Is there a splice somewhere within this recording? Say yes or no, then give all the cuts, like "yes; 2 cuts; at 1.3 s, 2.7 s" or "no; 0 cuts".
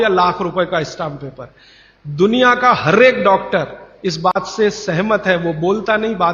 no; 0 cuts